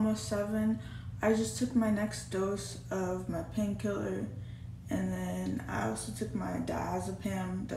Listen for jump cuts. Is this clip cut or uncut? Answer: uncut